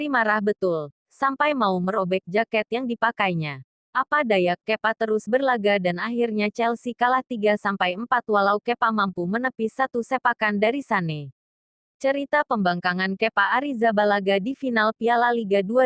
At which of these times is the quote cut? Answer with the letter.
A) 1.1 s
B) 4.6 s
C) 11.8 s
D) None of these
C